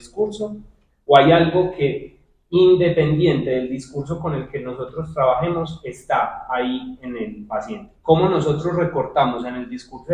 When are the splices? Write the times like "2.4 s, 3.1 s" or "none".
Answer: none